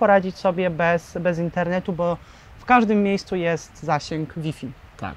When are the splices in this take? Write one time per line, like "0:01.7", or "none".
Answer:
none

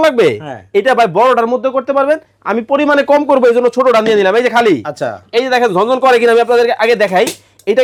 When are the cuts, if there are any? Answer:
none

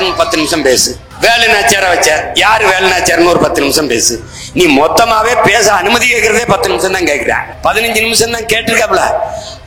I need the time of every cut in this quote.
0:01.0
0:07.5

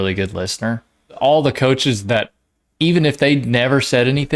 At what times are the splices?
0:01.2

